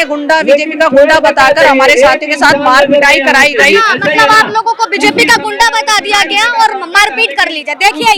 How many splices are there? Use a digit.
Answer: 0